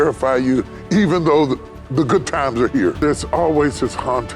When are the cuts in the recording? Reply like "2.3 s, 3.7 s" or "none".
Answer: 3.0 s